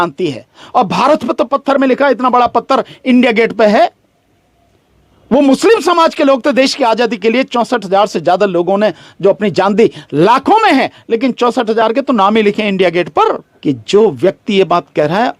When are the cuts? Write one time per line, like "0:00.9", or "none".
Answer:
0:13.5